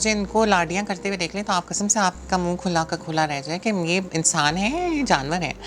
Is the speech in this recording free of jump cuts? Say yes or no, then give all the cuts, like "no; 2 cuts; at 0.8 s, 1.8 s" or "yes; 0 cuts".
yes; 0 cuts